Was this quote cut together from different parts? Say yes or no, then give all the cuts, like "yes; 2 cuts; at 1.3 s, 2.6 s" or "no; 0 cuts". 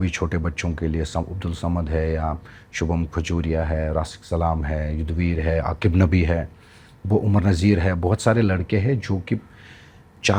no; 0 cuts